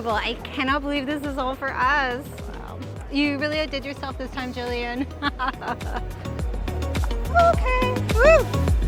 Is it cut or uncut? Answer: uncut